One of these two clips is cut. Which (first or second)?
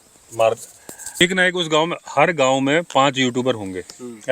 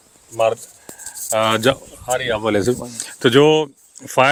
first